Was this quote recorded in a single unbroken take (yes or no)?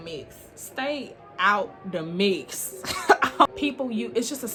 yes